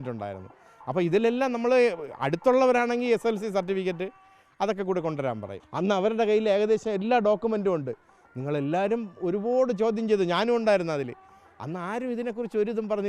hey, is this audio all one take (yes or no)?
no